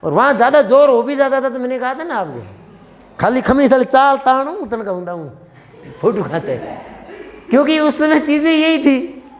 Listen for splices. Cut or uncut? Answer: uncut